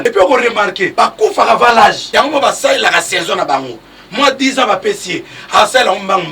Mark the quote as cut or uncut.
cut